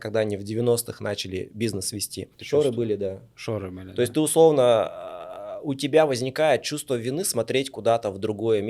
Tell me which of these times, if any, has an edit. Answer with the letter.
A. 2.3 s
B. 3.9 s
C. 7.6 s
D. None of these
A